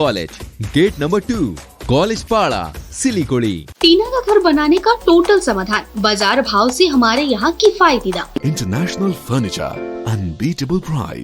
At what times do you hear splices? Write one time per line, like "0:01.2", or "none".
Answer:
0:03.7
0:08.4